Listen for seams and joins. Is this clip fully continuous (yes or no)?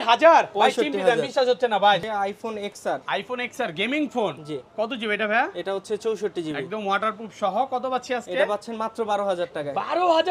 no